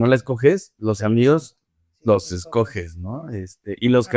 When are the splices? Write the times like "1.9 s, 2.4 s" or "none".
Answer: none